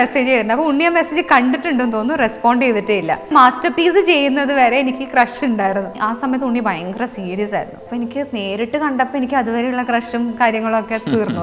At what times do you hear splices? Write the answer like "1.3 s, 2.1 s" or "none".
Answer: 3.3 s, 6.0 s, 7.8 s